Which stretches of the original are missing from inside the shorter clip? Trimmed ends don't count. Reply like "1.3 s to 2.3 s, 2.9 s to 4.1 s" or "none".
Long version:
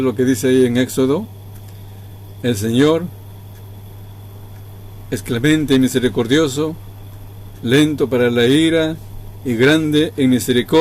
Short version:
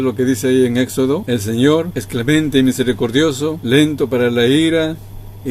1.2 s to 2.4 s, 3.1 s to 5.1 s, 6.8 s to 7.6 s